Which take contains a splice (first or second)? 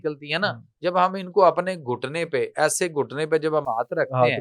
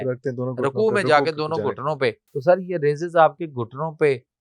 second